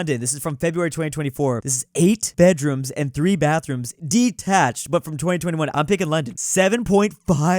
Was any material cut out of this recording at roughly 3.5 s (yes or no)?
no